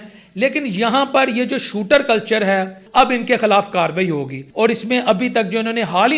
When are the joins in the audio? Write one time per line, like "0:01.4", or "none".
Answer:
0:02.8
0:04.4